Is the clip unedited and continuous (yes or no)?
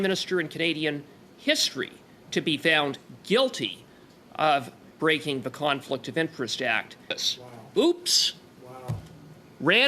no